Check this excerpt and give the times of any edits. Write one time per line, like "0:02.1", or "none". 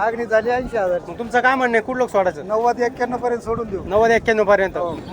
none